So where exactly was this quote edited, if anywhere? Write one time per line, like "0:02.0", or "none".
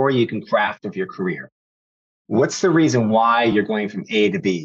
none